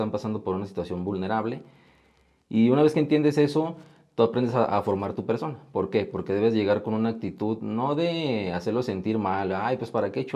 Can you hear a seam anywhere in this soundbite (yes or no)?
no